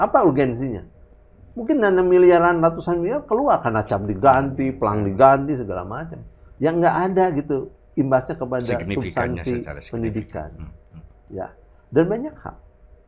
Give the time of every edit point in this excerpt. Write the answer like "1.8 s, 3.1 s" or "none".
none